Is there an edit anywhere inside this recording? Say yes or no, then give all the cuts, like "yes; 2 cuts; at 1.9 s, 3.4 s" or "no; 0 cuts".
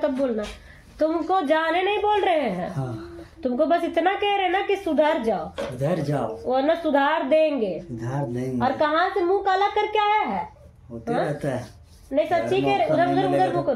no; 0 cuts